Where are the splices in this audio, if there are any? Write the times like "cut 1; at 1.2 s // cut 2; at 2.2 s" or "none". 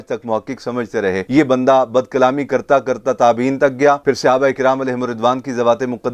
none